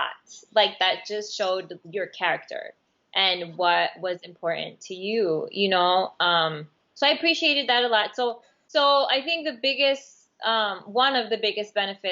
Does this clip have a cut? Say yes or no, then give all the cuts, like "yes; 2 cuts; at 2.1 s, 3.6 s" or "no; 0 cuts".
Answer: yes; 1 cut; at 8.5 s